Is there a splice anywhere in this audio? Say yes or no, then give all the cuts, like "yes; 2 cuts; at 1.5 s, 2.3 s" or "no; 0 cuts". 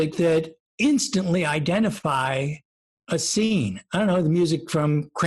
no; 0 cuts